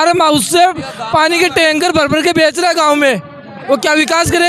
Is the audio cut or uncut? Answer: uncut